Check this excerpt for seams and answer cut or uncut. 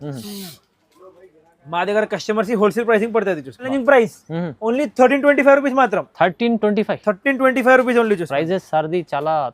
cut